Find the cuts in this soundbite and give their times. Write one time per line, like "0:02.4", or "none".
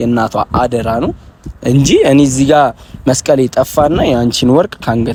none